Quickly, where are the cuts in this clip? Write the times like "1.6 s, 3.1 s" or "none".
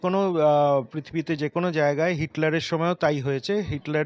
none